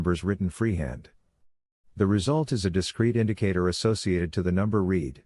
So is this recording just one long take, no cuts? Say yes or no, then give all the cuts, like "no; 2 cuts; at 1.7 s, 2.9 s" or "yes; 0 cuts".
no; 1 cut; at 3.9 s